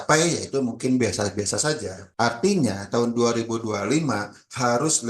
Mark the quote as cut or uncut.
cut